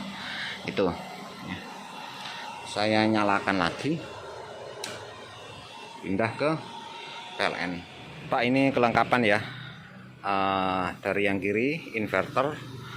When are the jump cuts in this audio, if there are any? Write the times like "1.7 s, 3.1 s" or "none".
7.9 s